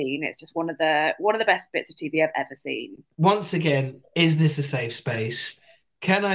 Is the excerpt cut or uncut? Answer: cut